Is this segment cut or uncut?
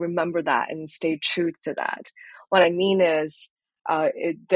uncut